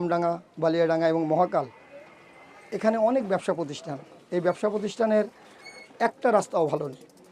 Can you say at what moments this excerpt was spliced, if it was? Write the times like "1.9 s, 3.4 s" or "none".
none